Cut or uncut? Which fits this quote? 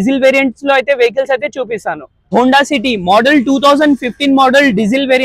cut